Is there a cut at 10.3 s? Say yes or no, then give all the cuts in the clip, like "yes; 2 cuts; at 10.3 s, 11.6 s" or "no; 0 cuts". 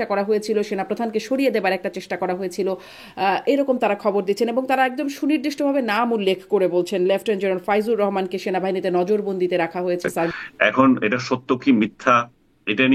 yes; 1 cut; at 10.3 s